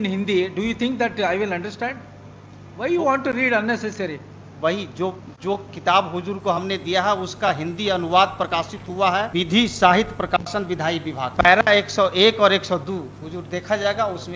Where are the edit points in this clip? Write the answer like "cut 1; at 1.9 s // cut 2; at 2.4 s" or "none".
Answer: none

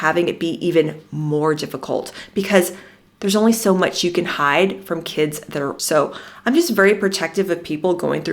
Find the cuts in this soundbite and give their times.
cut 1; at 5.8 s

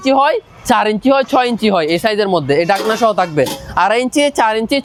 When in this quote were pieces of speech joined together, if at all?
none

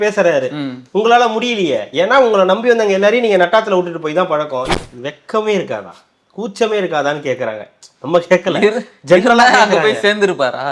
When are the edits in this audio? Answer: cut 1; at 4.7 s

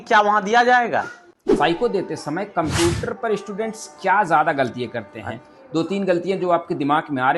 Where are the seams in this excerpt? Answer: cut 1; at 1.5 s

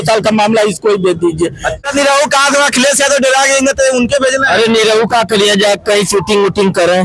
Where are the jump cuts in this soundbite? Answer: cut 1; at 1.8 s

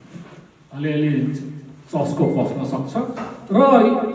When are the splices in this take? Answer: none

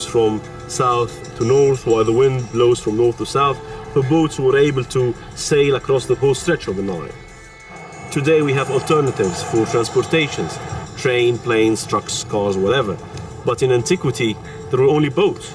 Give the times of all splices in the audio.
none

